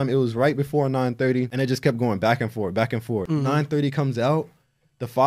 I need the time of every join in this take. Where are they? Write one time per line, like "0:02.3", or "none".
0:01.5
0:03.2